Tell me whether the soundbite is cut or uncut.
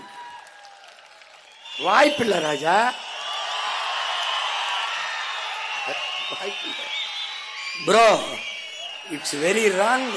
cut